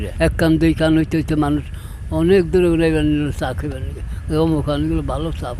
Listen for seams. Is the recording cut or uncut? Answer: uncut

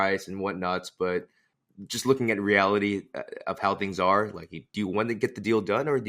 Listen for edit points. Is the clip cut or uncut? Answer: cut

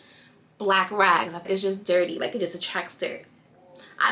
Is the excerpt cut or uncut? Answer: cut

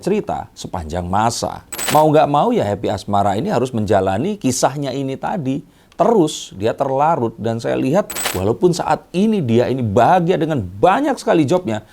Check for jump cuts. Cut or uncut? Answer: cut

